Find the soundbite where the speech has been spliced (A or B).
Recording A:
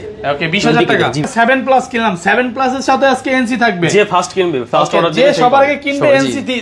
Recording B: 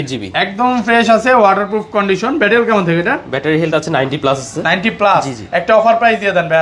A